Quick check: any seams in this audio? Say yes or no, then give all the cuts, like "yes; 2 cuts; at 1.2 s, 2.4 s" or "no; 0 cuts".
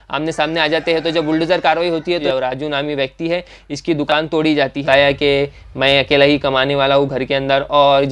yes; 2 cuts; at 2.2 s, 4.9 s